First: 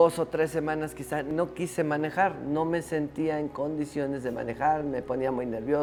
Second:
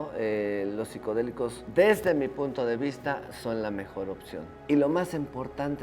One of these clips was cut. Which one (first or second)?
second